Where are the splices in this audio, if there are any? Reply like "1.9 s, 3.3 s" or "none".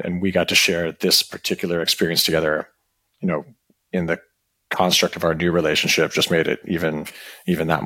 none